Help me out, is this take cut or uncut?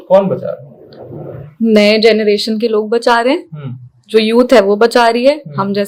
uncut